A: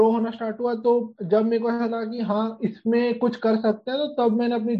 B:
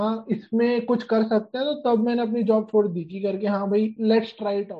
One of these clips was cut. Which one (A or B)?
B